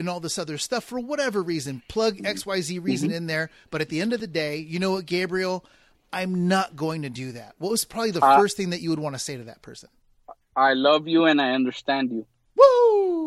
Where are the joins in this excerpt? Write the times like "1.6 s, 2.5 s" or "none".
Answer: none